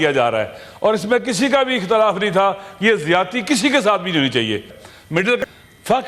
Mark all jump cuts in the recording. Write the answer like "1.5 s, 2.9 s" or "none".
4.8 s